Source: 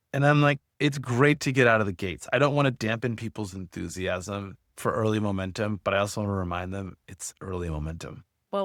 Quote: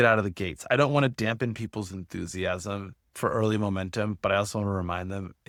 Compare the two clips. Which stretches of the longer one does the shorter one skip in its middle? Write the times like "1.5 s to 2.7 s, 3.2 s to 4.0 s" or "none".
none